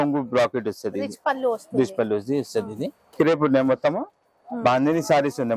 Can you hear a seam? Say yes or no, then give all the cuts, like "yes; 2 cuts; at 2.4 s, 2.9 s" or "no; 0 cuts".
yes; 1 cut; at 3.0 s